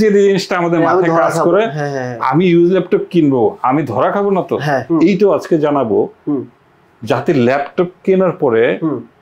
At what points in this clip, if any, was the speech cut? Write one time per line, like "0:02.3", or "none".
0:04.9

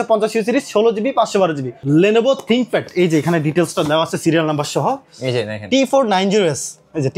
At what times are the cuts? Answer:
0:01.7

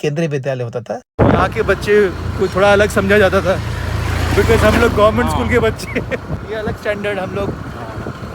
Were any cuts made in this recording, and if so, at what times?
0:01.1
0:06.4

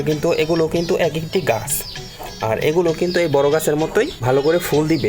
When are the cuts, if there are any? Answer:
0:04.2

